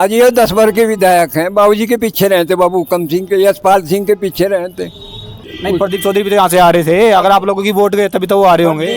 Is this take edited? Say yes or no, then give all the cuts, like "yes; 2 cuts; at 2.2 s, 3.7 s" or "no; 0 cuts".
yes; 1 cut; at 5.4 s